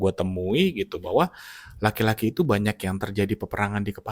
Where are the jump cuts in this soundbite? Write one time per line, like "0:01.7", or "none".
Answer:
none